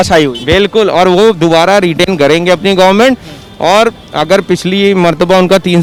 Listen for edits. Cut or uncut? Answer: uncut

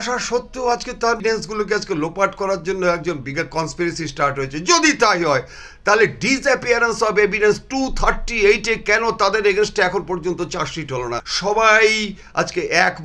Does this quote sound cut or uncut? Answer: cut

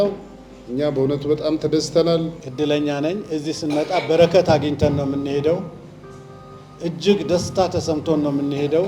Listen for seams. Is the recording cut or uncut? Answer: cut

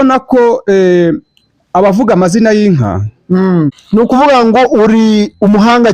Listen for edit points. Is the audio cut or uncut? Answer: cut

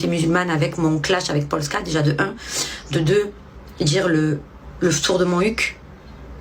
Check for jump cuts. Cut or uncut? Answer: uncut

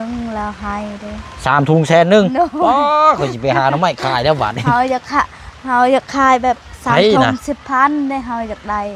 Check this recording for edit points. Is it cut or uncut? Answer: uncut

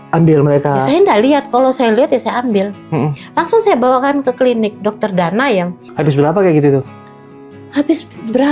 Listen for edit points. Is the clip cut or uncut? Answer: uncut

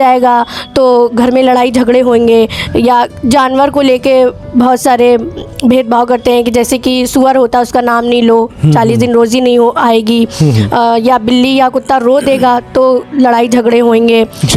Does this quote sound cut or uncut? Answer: uncut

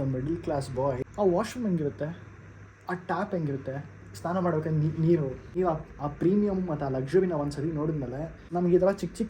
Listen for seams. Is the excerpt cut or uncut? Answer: cut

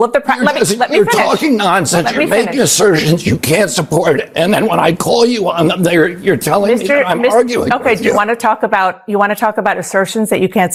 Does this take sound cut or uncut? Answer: uncut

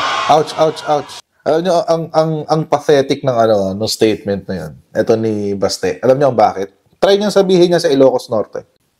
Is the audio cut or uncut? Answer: cut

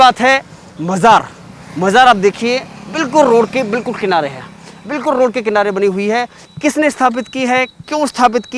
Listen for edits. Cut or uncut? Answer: uncut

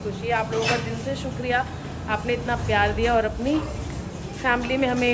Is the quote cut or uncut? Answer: uncut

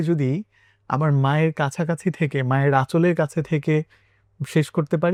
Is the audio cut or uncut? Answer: uncut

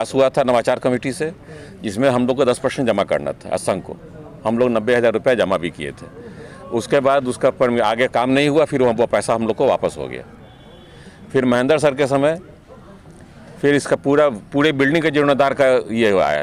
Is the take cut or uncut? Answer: uncut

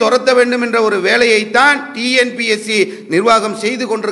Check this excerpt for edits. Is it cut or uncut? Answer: uncut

